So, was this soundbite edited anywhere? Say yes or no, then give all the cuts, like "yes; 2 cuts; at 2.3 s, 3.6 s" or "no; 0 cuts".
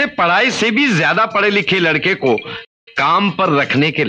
no; 0 cuts